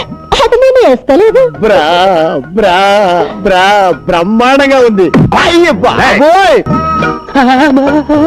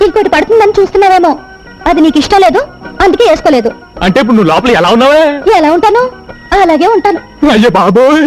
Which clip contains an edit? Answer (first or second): first